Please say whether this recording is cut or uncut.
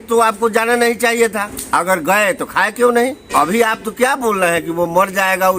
cut